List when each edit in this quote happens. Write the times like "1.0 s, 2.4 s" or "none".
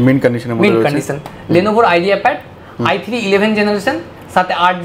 none